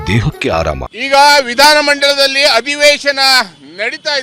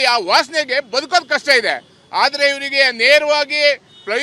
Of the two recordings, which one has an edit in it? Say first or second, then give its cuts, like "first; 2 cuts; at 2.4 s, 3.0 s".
first; 1 cut; at 1.0 s